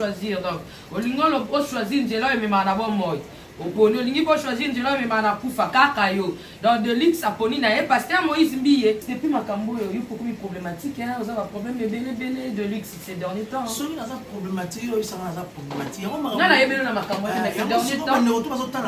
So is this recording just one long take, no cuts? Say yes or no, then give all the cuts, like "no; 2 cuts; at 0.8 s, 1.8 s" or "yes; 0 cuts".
no; 1 cut; at 9.1 s